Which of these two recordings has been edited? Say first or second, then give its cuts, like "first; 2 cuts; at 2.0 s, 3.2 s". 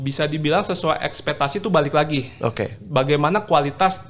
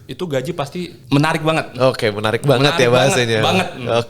second; 1 cut; at 1.0 s